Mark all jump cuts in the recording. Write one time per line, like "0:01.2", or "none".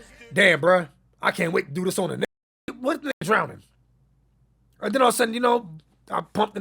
0:02.8